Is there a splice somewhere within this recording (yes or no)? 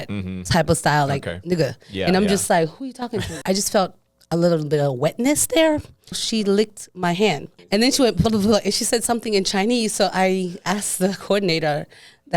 yes